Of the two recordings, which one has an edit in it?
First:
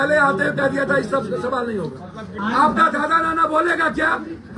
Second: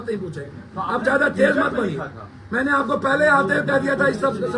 first; 1 cut; at 2.4 s

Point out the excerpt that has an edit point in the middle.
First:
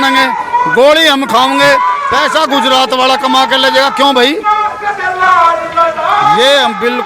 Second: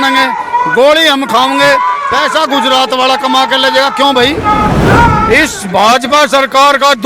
second; 1 cut; at 4.8 s

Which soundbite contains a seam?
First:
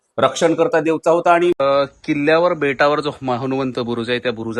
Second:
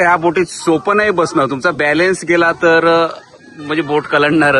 first; 1 cut; at 1.6 s

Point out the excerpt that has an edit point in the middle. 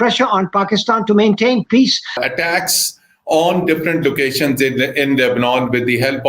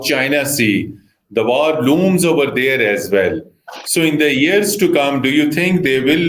first; 1 cut; at 2.2 s

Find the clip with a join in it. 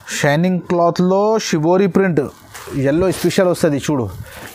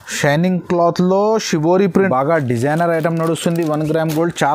second; 1 cut; at 2.1 s

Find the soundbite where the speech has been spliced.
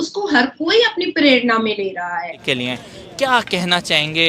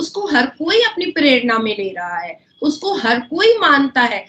first; 1 cut; at 2.4 s

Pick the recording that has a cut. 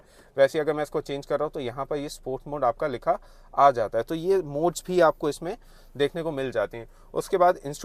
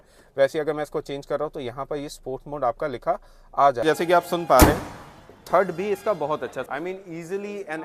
second; 2 cuts; at 3.8 s, 6.6 s

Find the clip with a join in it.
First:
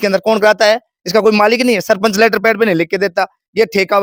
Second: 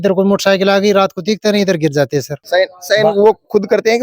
second; 1 cut; at 2.4 s

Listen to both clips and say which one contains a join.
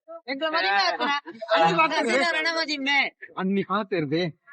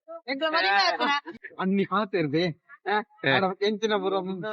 second; 1 cut; at 1.4 s

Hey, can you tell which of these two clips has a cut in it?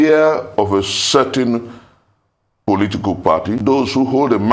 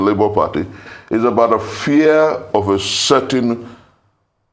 first; 1 cut; at 3.6 s

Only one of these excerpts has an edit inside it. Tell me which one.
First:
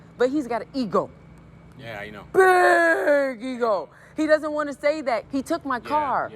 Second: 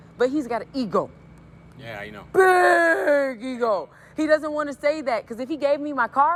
first; 1 cut; at 5.3 s

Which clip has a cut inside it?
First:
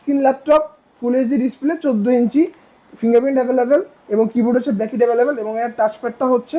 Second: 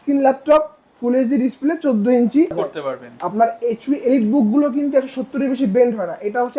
second; 1 cut; at 2.7 s

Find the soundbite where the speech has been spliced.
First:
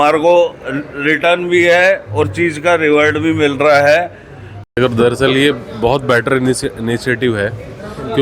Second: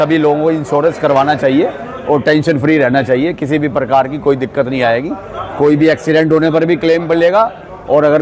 first; 1 cut; at 4.5 s

